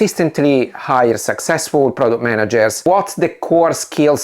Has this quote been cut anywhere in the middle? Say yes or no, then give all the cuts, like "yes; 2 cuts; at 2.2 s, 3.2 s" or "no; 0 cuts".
yes; 1 cut; at 2.8 s